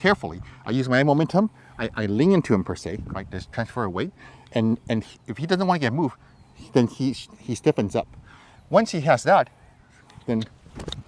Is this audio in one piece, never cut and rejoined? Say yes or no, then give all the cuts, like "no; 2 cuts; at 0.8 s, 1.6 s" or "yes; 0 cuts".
yes; 0 cuts